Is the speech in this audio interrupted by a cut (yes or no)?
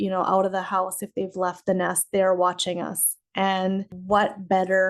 yes